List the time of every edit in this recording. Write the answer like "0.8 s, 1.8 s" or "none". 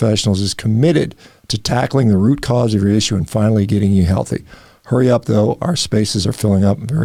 none